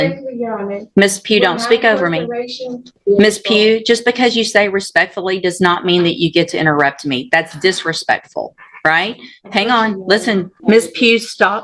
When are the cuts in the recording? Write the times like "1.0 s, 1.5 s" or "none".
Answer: 3.0 s, 10.5 s